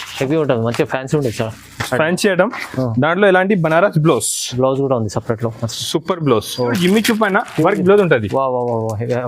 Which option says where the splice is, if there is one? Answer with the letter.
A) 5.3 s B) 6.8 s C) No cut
B